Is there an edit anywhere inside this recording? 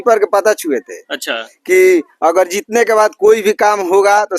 no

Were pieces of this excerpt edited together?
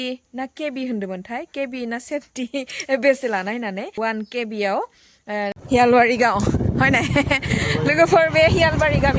yes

